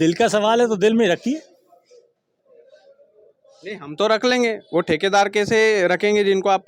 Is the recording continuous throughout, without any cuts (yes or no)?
yes